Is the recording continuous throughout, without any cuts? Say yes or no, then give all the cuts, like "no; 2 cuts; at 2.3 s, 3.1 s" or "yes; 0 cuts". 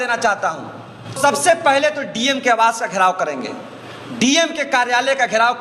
no; 1 cut; at 1.2 s